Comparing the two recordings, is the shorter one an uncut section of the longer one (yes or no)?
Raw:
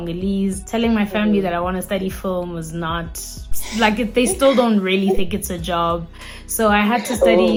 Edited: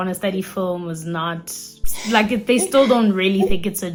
yes